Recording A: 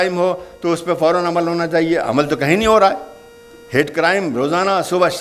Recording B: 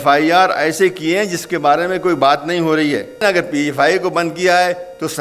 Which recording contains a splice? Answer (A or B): B